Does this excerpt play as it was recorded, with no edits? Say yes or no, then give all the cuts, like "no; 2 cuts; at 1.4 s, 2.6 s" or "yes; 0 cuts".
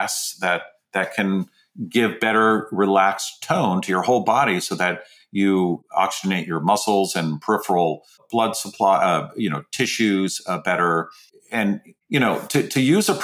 no; 3 cuts; at 5.8 s, 8.2 s, 11.9 s